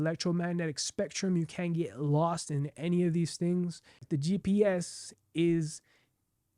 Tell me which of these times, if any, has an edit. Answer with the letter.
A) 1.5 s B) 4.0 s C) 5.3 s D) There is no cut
B